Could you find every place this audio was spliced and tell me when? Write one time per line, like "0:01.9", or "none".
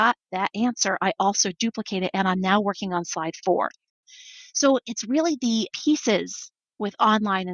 0:04.1